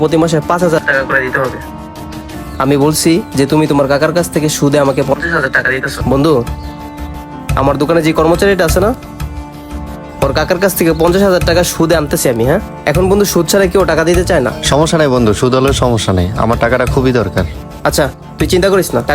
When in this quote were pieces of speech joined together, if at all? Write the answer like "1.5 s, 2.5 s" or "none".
5.9 s